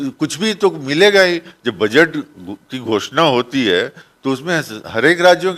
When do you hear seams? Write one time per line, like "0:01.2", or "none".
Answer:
none